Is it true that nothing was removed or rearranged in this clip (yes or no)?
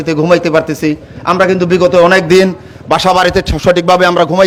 yes